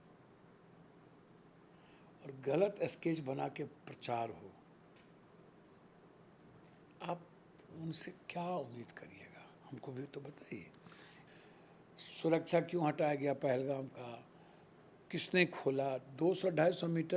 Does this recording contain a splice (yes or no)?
yes